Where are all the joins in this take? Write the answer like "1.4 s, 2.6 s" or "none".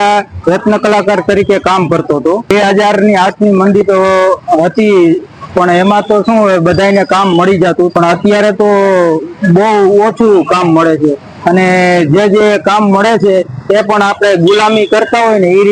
2.5 s, 7.9 s